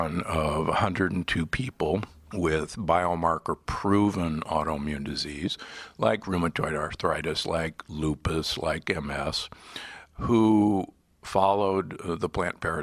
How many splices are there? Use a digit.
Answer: 2